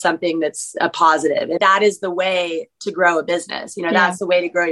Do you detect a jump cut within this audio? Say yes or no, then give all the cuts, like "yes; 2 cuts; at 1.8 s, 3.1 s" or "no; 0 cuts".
yes; 1 cut; at 1.6 s